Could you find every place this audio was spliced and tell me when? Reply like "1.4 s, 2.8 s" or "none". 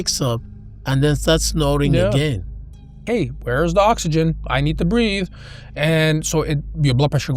2.6 s